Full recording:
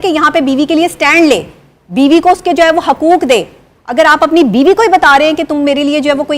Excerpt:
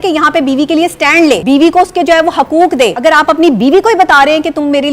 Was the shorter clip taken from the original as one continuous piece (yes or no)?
no